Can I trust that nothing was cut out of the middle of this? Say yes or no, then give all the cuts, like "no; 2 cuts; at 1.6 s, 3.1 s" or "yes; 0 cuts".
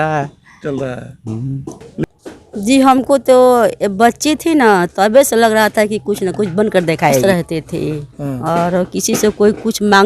no; 2 cuts; at 2.0 s, 7.2 s